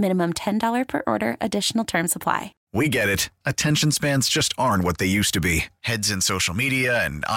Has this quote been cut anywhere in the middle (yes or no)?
yes